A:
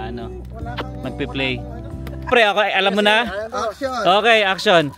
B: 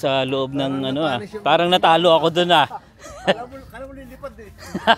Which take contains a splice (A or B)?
A